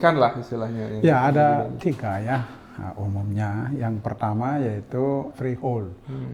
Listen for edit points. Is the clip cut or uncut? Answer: cut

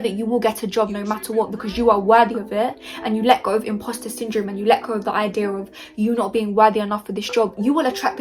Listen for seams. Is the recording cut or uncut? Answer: uncut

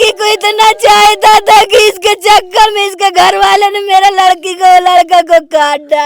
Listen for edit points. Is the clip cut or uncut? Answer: uncut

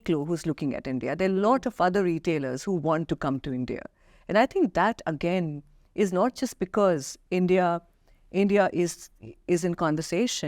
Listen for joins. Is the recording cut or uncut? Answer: uncut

